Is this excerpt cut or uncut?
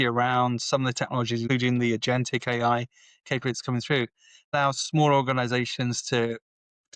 cut